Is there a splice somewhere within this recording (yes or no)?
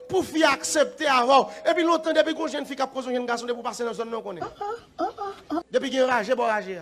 yes